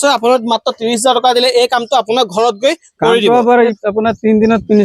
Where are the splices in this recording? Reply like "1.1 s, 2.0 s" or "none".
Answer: 3.8 s